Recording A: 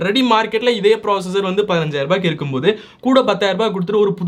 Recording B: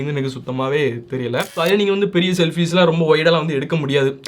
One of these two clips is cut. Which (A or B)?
B